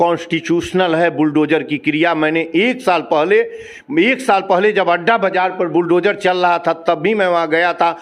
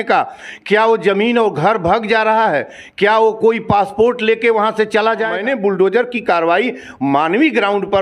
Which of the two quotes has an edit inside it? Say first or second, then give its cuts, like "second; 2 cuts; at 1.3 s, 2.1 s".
second; 1 cut; at 5.3 s